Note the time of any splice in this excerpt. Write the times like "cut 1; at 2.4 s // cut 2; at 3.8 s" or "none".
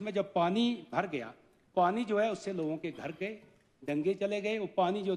cut 1; at 1.7 s